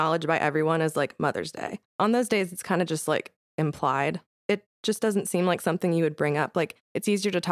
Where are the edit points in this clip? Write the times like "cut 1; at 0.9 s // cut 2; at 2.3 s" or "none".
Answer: cut 1; at 1.9 s // cut 2; at 4.3 s